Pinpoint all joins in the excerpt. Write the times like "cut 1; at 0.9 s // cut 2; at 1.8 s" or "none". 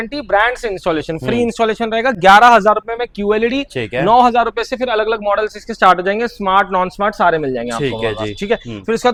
none